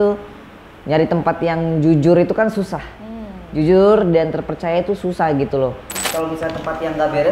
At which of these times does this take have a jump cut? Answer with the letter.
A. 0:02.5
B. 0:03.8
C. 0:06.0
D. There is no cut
C